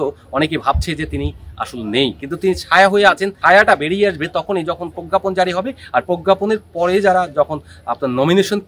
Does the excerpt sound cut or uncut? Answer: cut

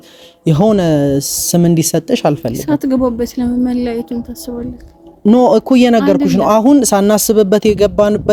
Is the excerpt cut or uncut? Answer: uncut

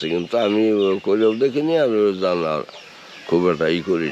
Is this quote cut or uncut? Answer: uncut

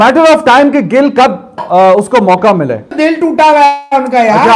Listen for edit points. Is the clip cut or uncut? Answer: cut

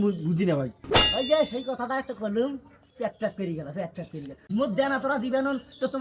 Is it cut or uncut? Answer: cut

